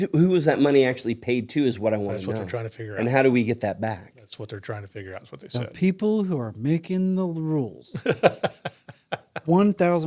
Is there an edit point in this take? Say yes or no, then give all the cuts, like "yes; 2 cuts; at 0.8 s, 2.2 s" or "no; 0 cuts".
no; 0 cuts